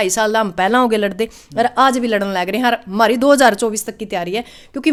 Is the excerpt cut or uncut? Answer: uncut